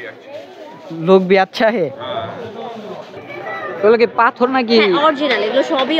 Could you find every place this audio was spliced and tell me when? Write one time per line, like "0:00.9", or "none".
0:03.1